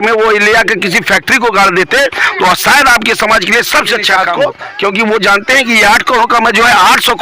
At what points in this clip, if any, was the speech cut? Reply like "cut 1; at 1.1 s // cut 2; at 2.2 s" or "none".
cut 1; at 4.1 s